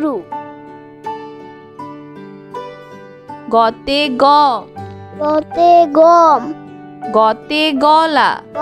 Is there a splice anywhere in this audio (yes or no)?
no